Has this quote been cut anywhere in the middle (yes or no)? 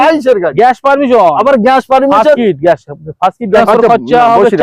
yes